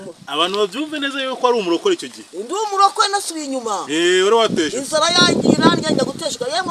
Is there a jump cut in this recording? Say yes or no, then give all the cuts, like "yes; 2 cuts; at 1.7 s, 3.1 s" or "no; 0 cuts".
no; 0 cuts